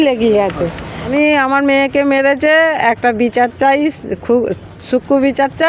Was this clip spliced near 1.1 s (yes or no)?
yes